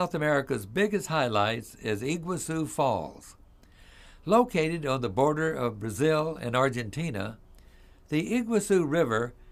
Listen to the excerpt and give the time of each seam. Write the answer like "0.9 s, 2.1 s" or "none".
none